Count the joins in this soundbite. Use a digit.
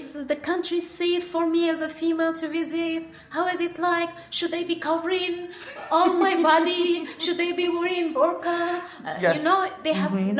0